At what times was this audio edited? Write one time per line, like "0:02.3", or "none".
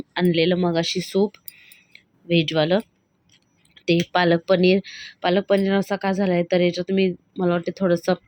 none